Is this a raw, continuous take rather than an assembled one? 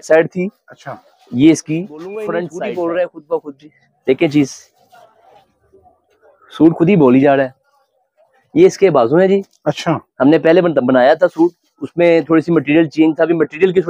no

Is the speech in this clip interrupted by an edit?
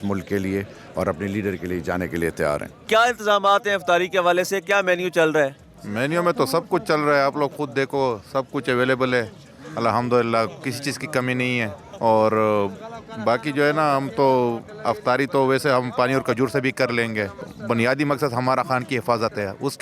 no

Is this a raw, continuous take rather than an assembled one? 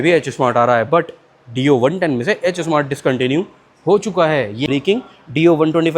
no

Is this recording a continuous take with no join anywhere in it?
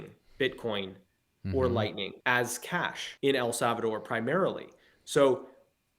no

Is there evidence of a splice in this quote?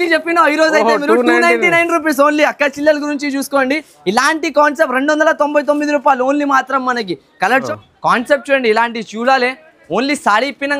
yes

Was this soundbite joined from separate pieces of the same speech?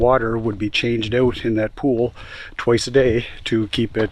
no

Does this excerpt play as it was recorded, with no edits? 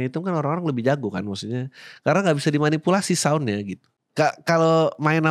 no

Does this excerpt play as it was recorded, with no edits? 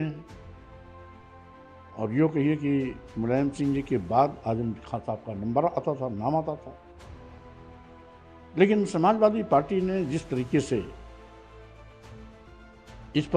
no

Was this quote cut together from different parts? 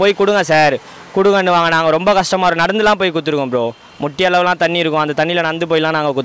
no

